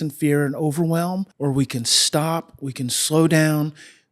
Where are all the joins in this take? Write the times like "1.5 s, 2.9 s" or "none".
1.3 s